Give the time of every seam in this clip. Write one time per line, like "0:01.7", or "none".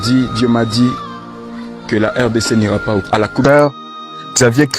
0:03.4